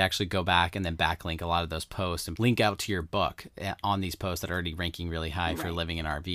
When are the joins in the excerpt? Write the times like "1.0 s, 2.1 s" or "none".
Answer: 2.3 s